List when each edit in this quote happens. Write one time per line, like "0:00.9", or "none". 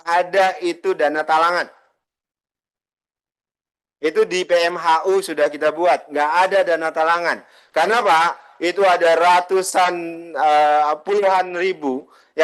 none

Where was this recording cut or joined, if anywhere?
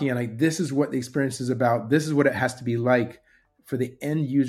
none

